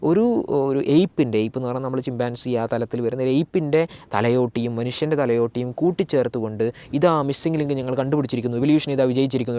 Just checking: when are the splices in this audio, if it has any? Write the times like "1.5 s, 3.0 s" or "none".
none